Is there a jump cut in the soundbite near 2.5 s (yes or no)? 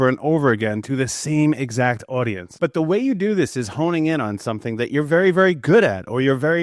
yes